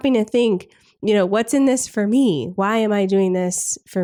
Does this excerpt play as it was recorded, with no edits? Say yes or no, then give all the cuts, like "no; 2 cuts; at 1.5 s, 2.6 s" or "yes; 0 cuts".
yes; 0 cuts